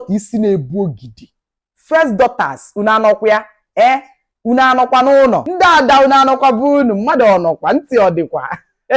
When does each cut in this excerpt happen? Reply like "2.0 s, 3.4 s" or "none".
5.5 s